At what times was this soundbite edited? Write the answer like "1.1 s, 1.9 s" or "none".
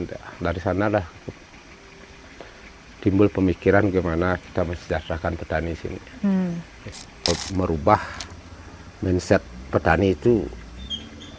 7.3 s